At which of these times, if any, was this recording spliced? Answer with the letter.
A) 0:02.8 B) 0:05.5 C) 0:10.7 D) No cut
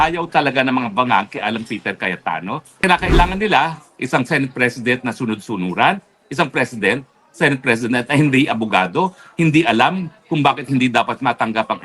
A